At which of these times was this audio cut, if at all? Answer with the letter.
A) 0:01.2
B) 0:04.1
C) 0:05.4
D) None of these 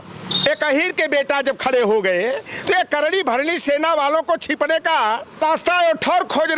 C